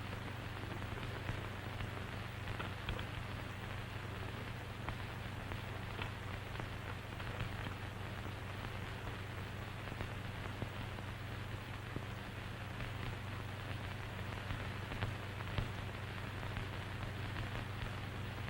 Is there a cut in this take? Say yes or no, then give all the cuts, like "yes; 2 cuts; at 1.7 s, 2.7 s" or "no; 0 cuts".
yes; 1 cut; at 16.1 s